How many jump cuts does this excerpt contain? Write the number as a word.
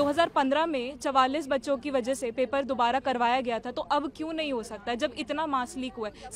zero